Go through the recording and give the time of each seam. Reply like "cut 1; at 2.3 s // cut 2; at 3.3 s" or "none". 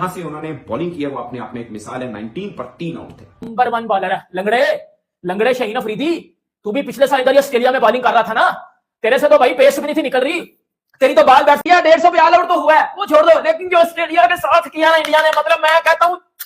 cut 1; at 3.4 s // cut 2; at 11.6 s